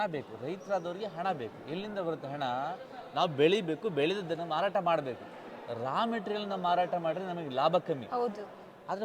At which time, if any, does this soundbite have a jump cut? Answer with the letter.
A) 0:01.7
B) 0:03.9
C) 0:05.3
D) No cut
D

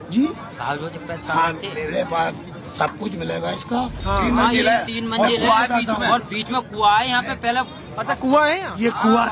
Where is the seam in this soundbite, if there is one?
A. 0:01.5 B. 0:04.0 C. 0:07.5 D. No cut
B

